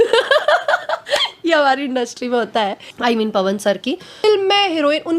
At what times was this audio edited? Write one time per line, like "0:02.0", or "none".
0:02.8
0:04.2